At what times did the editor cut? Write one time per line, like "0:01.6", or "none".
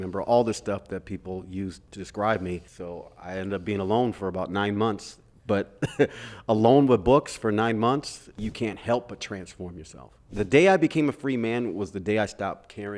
0:01.9
0:02.7
0:08.4
0:10.3